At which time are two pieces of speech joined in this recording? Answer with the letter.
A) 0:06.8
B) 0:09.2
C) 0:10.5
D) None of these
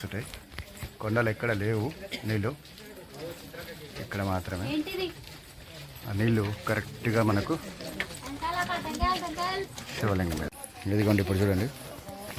C